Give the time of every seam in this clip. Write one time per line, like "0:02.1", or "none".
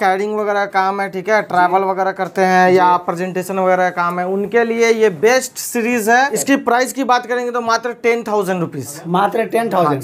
0:06.4

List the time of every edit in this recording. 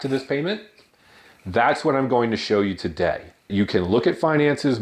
0:03.5

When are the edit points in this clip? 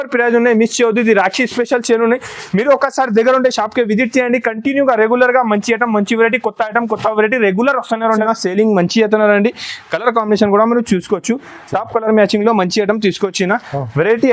0:08.2

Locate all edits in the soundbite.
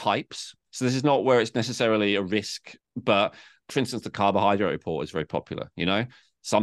0:03.7

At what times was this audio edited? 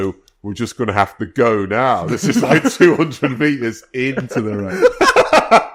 none

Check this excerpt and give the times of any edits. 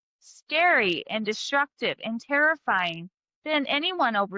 none

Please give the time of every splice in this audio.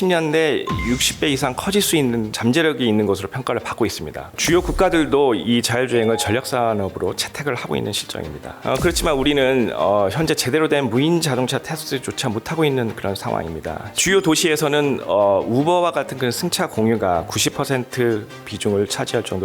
0:02.3
0:04.3
0:08.5
0:14.0

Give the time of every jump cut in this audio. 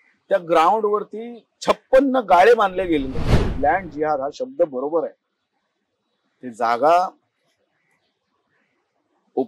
0:03.4

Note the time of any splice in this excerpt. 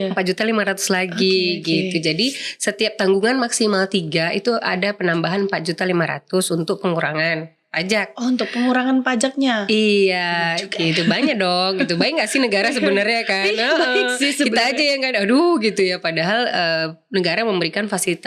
none

